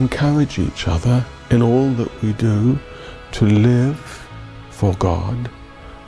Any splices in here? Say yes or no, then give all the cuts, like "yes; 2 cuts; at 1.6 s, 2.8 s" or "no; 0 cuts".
no; 0 cuts